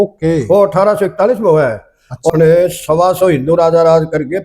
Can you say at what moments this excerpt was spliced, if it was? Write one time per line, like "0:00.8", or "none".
0:02.3